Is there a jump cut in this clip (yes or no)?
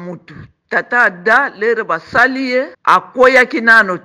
yes